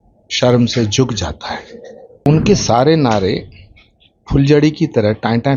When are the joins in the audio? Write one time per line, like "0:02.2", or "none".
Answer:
0:02.3